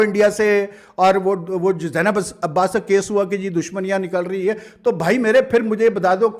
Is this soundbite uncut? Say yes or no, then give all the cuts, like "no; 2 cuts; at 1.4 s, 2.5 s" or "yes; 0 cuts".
yes; 0 cuts